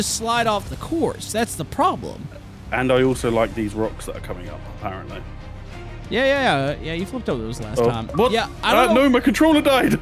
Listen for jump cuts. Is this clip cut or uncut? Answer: uncut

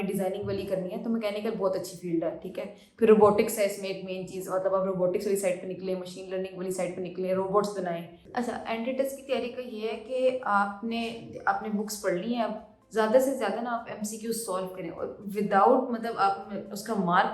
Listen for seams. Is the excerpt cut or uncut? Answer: cut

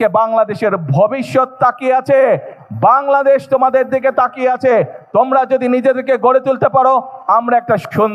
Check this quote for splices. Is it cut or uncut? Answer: uncut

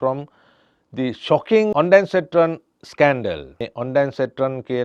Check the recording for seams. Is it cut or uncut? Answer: cut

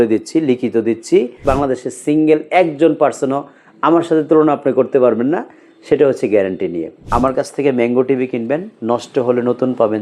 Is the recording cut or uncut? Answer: cut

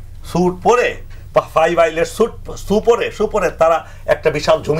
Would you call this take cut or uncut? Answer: uncut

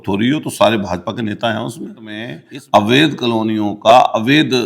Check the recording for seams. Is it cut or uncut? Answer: cut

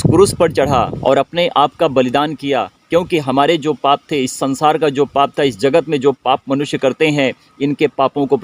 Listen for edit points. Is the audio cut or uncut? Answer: uncut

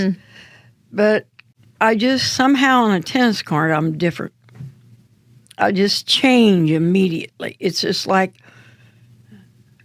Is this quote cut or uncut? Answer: uncut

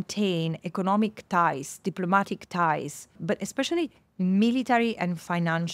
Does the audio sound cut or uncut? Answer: cut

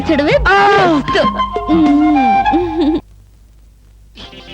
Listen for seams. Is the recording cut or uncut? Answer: uncut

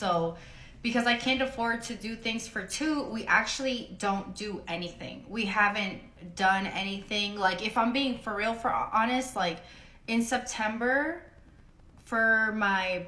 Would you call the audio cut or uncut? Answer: uncut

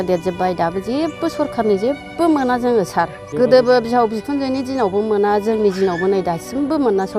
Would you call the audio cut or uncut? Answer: cut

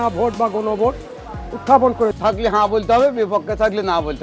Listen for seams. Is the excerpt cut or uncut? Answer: cut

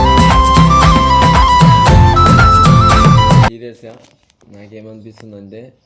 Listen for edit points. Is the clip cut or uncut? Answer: cut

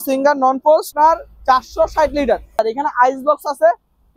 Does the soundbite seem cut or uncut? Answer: cut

